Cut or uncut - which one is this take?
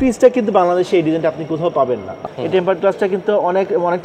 cut